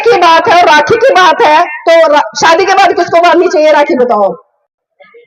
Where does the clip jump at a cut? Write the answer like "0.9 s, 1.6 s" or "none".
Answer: none